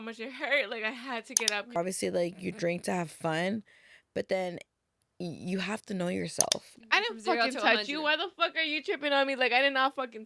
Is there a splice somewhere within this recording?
yes; 2 cuts; at 1.8 s, 6.8 s

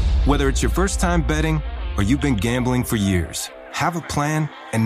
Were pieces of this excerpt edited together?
no; 0 cuts

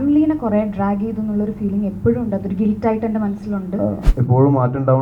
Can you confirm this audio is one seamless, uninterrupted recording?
no; 1 cut; at 4.1 s

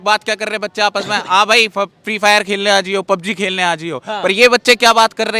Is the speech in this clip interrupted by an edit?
no; 0 cuts

